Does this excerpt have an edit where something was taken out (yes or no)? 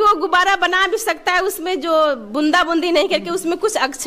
no